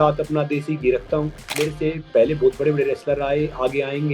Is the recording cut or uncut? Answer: cut